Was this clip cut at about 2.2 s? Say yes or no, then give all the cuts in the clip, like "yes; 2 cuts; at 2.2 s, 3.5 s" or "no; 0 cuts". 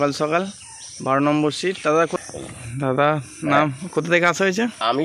yes; 1 cut; at 2.2 s